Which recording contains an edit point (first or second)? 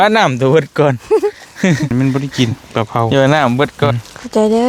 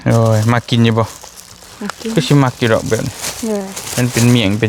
first